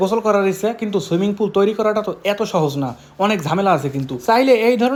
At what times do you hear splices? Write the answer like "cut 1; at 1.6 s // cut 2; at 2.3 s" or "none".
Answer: none